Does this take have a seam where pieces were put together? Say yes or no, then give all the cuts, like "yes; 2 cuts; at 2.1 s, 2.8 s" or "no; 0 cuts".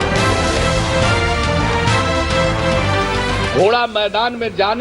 yes; 1 cut; at 2.0 s